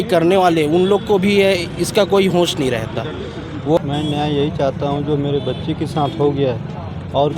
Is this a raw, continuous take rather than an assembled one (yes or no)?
no